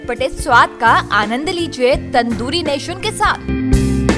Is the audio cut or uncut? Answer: uncut